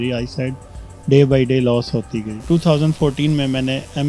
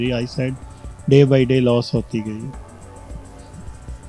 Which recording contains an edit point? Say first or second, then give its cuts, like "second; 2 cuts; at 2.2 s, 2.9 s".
first; 1 cut; at 2.4 s